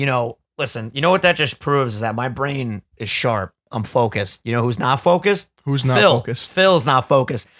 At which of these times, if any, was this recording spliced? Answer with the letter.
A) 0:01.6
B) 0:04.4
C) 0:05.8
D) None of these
B